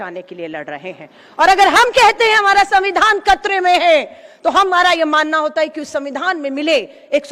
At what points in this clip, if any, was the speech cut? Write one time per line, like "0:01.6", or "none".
none